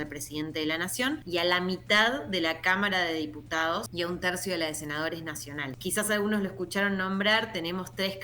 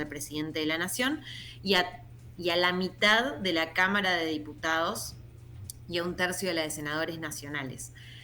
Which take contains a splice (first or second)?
first